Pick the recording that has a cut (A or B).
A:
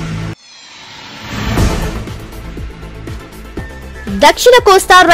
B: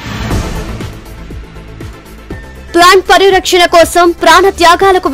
B